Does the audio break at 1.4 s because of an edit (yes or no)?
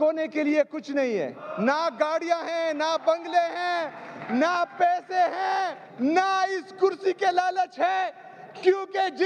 yes